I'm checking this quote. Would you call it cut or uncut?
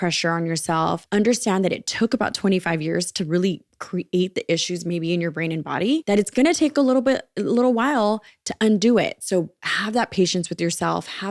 cut